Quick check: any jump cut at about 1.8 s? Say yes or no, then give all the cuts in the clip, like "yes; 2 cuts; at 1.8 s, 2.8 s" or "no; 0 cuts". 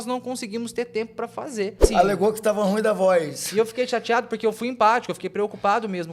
yes; 1 cut; at 1.8 s